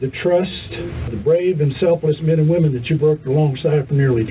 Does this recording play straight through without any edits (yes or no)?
no